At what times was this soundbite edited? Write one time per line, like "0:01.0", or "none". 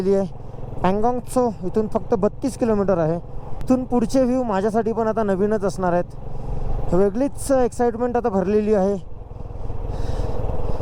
0:03.6